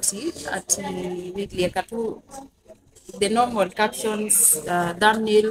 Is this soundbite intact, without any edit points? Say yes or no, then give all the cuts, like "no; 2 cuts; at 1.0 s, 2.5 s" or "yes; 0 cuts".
yes; 0 cuts